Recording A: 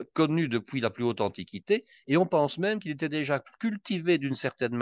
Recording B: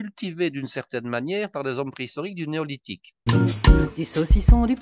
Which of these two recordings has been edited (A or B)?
B